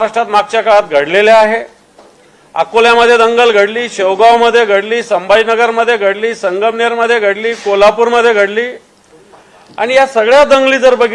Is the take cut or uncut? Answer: uncut